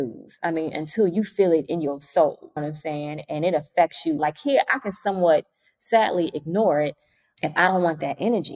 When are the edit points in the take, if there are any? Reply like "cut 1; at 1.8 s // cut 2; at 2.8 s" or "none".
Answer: cut 1; at 4.2 s

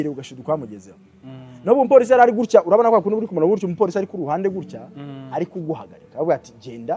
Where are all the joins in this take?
none

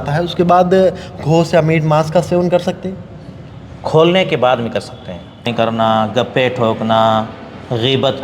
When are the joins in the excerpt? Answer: cut 1; at 5.5 s

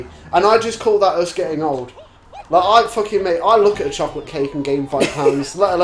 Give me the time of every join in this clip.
none

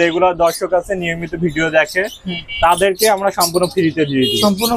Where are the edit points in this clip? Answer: none

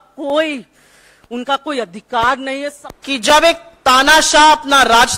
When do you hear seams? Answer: cut 1; at 2.8 s

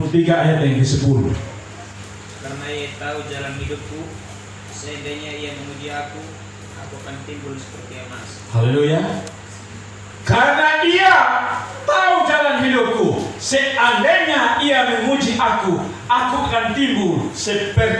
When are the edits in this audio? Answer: cut 1; at 2.0 s

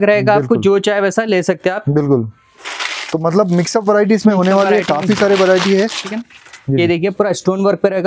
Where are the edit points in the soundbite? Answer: cut 1; at 6.1 s

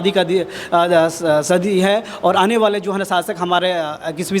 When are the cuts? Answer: none

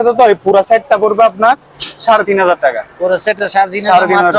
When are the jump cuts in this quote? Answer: none

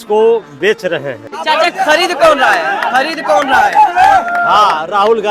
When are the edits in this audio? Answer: cut 1; at 1.4 s

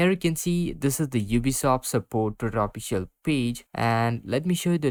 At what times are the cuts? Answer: none

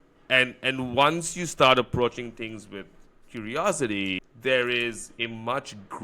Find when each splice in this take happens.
cut 1; at 4.3 s

